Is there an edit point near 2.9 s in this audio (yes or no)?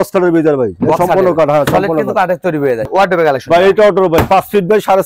yes